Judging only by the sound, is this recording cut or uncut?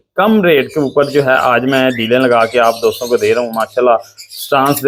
uncut